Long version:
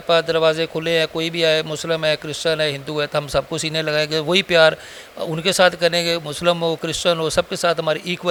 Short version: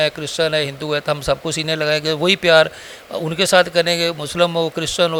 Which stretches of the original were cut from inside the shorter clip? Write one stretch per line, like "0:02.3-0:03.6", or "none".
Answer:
none